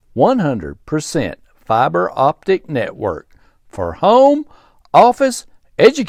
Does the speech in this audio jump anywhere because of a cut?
no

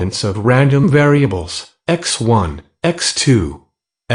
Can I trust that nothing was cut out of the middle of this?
yes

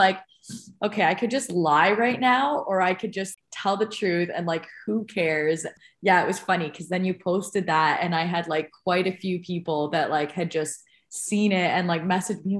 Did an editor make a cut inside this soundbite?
yes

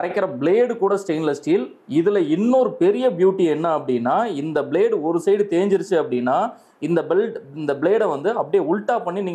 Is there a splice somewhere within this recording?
no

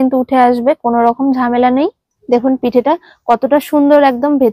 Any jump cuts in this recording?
yes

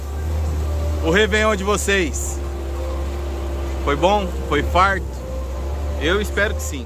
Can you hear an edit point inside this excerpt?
no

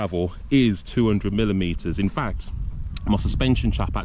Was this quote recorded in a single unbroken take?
yes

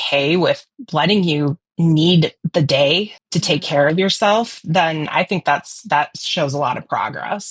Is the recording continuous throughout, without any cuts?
yes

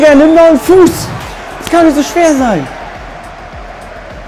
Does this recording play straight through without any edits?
yes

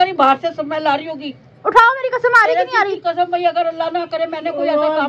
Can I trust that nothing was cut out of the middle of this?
yes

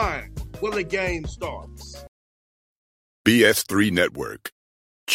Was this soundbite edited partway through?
yes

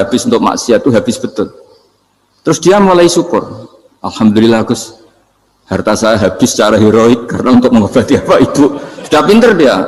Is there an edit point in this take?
no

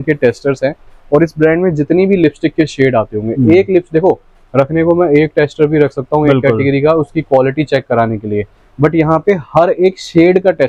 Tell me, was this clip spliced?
no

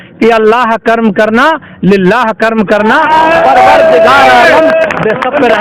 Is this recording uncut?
yes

